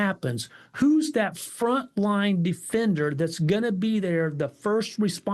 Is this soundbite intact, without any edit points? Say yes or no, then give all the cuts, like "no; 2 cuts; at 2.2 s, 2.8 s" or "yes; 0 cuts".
yes; 0 cuts